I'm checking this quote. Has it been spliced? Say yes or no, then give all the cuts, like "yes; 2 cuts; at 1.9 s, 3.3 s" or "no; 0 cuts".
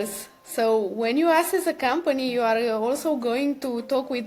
no; 0 cuts